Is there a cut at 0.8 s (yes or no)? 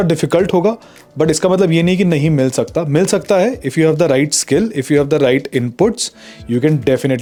no